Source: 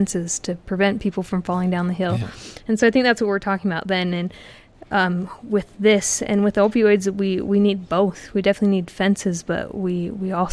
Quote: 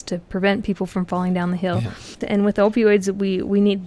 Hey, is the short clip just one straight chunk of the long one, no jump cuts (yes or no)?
no